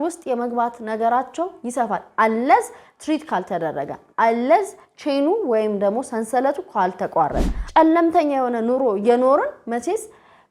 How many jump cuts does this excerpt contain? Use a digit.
1